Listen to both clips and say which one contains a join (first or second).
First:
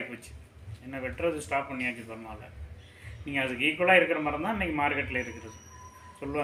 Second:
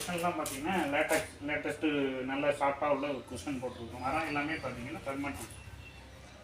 second